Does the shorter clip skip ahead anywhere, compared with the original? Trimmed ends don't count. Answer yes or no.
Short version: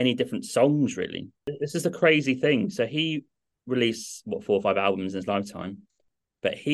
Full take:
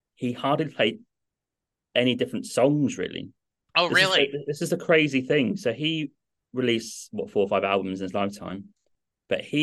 yes